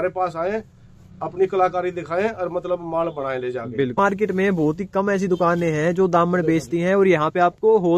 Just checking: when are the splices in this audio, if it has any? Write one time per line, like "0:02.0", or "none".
0:04.0